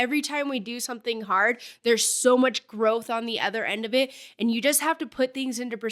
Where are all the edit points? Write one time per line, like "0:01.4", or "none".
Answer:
none